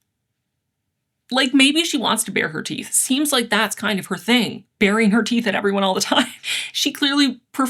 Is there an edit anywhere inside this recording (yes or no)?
no